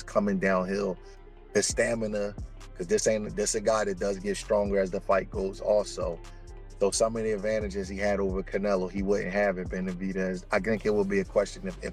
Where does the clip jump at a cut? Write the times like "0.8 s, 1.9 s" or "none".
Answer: none